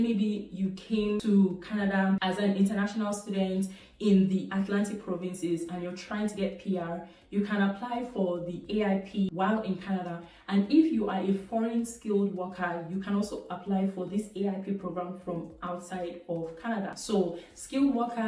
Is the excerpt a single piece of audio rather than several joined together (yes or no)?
yes